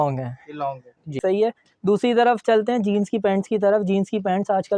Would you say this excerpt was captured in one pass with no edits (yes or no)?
no